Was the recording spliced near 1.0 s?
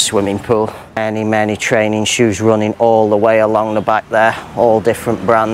yes; 1 cut; at 1.0 s

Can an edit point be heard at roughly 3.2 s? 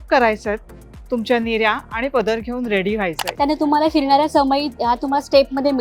yes; 1 cut; at 3.2 s

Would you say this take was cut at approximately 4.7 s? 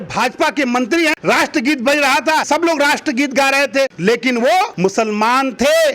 yes; 4 cuts; at 1.1 s, 2.5 s, 4.0 s, 4.7 s

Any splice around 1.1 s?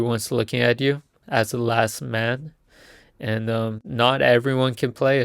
yes; 2 cuts; at 1.1 s, 3.8 s

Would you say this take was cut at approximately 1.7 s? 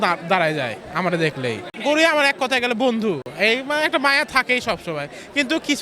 yes; 2 cuts; at 1.7 s, 3.3 s

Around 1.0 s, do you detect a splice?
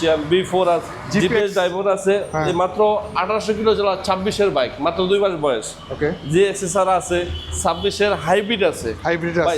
yes; 1 cut; at 1.0 s

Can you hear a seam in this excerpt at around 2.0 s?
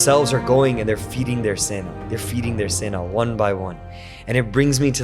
yes; 1 cut; at 2.0 s

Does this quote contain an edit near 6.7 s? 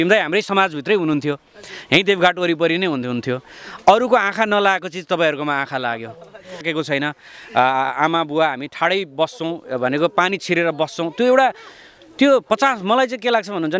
yes; 1 cut; at 6.7 s

